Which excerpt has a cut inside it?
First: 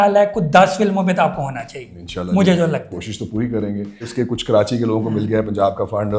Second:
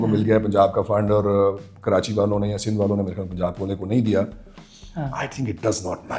first; 1 cut; at 4.1 s

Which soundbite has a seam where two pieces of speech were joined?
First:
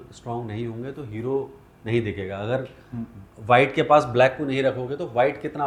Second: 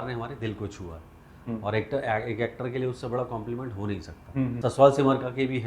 second; 1 cut; at 4.5 s

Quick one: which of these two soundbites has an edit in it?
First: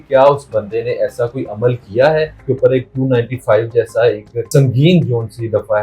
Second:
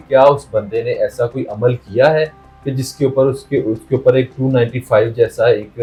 first; 2 cuts; at 2.4 s, 4.5 s

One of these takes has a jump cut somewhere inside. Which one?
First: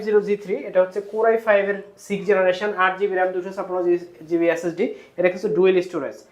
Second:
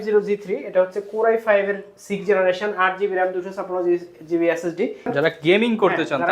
second; 1 cut; at 5.1 s

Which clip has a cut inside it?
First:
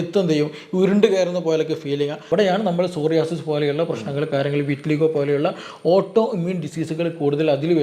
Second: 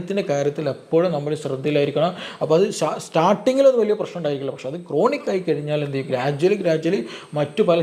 first; 1 cut; at 2.2 s

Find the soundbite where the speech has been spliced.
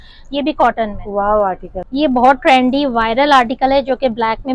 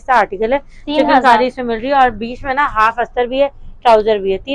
first; 1 cut; at 1.7 s

